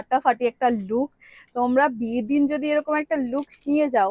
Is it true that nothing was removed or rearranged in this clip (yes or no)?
yes